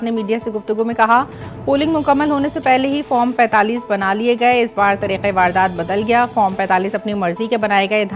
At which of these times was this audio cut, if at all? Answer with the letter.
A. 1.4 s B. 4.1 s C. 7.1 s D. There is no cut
D